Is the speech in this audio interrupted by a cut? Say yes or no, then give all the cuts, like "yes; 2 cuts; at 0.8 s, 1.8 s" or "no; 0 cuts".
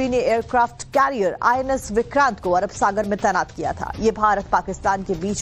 yes; 1 cut; at 2.4 s